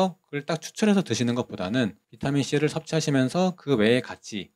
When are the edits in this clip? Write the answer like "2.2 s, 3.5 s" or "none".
2.1 s